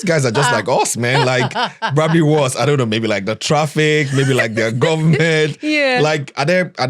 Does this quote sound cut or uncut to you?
uncut